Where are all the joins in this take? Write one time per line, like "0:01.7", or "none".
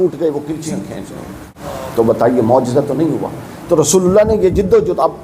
0:01.5